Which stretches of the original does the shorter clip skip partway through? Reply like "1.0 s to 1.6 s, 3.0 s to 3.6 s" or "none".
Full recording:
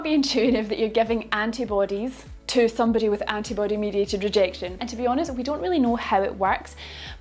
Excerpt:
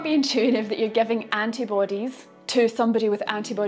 none